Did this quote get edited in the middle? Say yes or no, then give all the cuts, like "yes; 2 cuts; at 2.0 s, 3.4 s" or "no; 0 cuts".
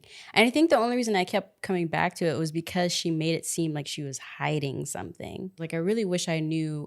yes; 1 cut; at 5.6 s